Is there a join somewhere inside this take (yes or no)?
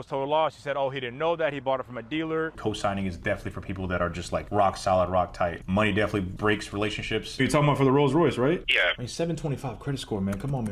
yes